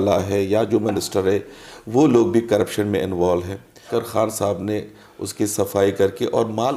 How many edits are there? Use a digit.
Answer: 1